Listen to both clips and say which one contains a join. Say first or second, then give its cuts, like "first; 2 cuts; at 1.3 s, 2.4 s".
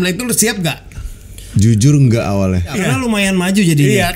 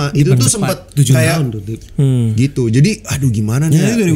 first; 1 cut; at 2.8 s